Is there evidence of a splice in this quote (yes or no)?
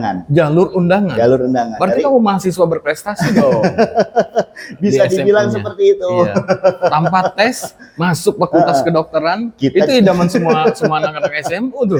no